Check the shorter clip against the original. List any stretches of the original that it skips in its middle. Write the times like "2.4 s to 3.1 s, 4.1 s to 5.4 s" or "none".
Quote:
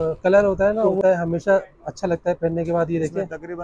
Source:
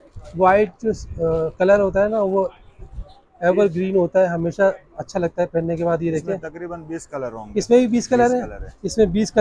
2.4 s to 4.1 s

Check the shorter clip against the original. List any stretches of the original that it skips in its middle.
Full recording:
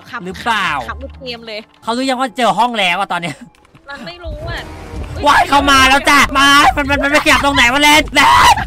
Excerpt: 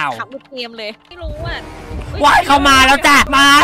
1.7 s to 4.1 s

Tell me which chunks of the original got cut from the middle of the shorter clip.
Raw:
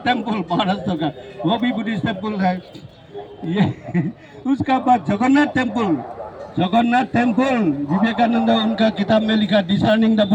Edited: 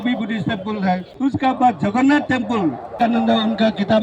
2.7 s to 4.3 s, 6.2 s to 8.1 s

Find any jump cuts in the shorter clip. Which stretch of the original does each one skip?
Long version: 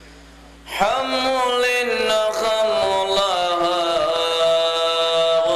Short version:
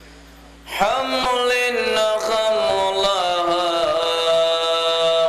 1.2 s to 1.4 s

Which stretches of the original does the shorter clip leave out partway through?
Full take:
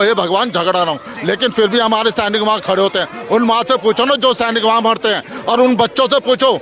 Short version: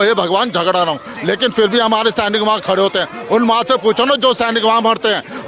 none

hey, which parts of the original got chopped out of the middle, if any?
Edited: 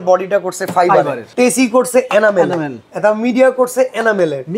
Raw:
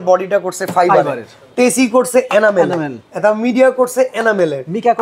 1.2 s to 1.4 s

